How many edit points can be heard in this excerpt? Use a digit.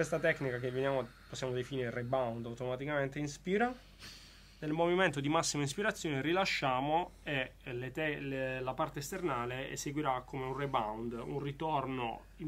0